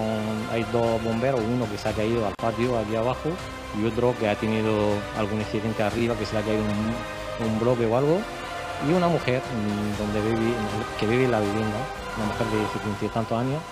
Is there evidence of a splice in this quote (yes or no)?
no